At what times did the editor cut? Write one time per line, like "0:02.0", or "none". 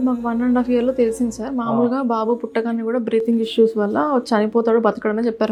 none